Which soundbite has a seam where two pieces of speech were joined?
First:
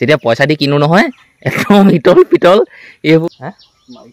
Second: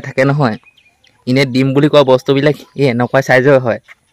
first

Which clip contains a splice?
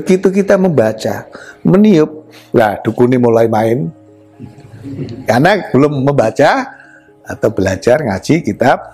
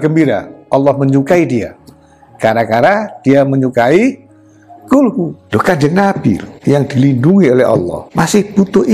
second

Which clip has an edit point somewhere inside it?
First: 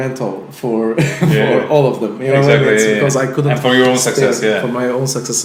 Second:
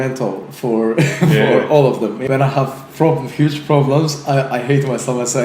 second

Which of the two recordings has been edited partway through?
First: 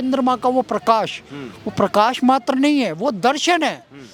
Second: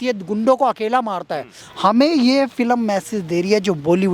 second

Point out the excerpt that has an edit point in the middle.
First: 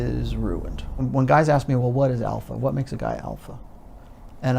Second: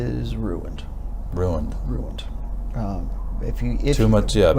first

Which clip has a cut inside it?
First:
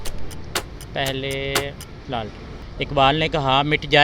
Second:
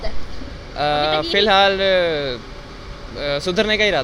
first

